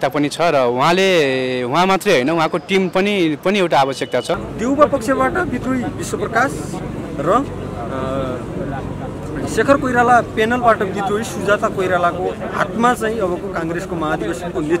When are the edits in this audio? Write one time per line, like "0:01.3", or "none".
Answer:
0:04.5